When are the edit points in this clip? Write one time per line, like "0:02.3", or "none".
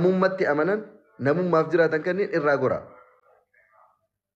none